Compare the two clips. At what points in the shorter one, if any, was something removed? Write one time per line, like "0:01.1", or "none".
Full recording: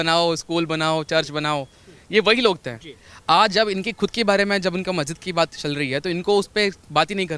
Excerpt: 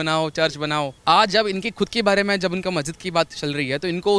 0:00.9